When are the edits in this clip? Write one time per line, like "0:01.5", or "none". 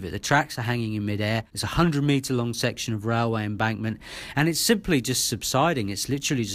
0:01.6